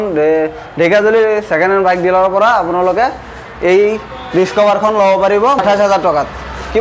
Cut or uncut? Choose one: cut